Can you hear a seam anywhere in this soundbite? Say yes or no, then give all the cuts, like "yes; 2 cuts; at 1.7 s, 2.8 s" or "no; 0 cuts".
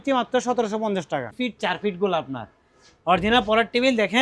yes; 1 cut; at 1.3 s